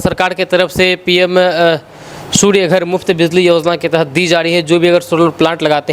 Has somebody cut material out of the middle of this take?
no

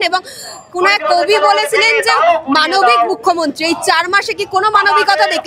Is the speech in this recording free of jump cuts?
yes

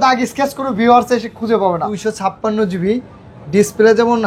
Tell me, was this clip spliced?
yes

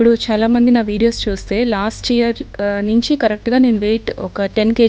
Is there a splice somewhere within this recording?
no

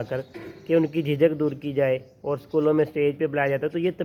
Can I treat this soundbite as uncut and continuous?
yes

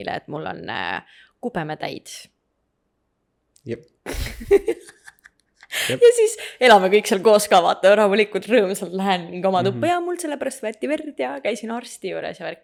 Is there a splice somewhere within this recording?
no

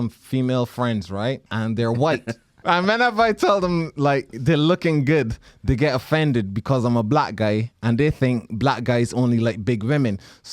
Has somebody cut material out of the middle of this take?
yes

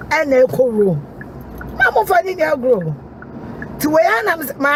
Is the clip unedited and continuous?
yes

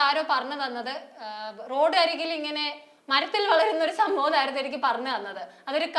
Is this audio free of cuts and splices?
yes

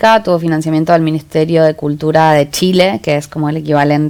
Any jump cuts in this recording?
no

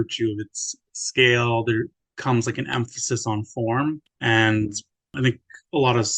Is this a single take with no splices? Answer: no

